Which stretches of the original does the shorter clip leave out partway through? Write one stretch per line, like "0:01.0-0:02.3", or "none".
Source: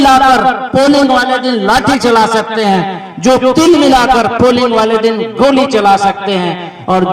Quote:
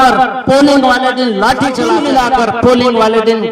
0:02.2-0:03.7

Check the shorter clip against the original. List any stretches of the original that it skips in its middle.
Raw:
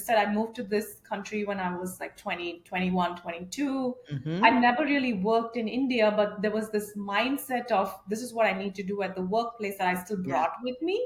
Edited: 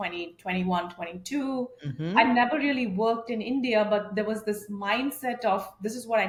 none

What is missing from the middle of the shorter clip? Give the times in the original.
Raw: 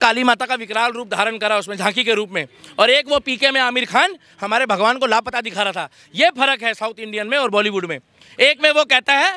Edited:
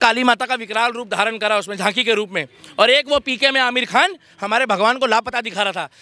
none

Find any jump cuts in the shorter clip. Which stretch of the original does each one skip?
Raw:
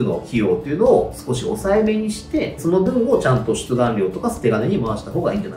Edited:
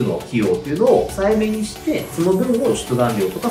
0:01.1-0:01.6
0:03.1-0:03.5

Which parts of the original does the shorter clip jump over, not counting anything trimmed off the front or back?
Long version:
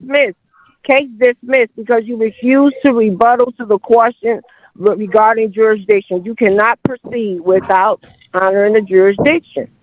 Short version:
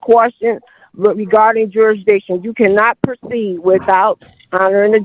none

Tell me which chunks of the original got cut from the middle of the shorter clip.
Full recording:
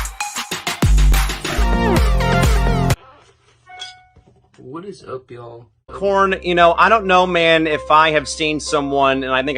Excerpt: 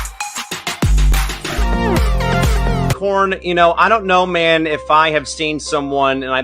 0:03.0-0:06.0

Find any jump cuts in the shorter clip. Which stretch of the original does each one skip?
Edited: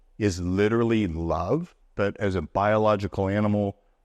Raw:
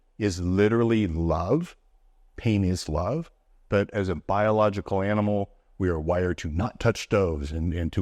0:01.8-0:03.5

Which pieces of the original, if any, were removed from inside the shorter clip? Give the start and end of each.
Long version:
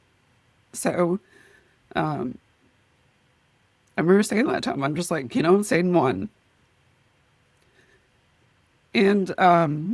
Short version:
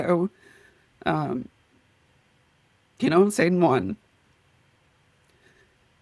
0:03.8-0:05.3

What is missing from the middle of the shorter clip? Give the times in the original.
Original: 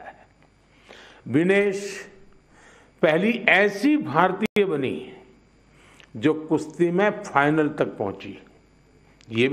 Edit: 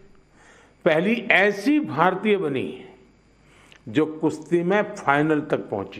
0:04.5-0:04.6

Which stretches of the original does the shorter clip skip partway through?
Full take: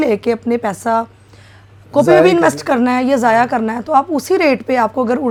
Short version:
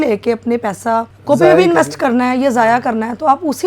0:01.1-0:01.8

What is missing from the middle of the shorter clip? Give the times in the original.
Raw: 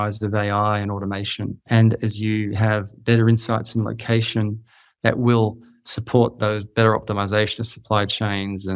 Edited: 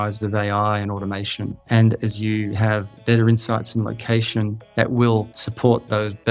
0:04.6-0:04.9
0:05.7-0:05.9

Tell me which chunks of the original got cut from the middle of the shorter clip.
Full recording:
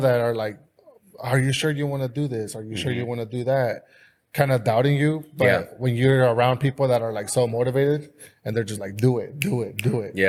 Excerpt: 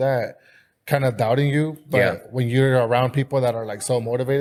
none

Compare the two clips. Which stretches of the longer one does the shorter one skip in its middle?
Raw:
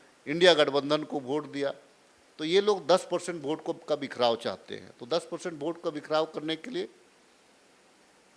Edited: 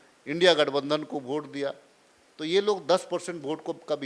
none

